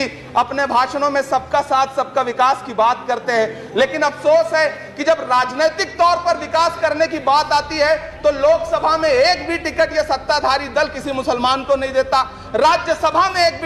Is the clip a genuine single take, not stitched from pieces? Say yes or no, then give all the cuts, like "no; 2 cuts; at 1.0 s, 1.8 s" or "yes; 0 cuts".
yes; 0 cuts